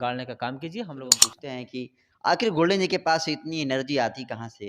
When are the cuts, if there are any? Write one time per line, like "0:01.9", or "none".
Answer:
0:01.3